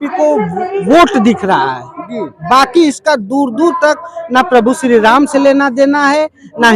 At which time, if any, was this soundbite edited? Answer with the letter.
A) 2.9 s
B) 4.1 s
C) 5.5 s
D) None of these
D